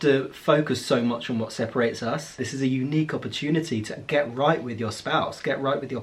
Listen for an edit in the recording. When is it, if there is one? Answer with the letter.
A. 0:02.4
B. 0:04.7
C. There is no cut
A